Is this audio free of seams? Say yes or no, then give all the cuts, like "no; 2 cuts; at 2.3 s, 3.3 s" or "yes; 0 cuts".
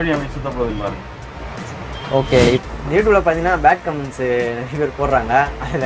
no; 1 cut; at 2.5 s